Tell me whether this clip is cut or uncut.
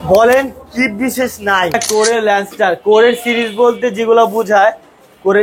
cut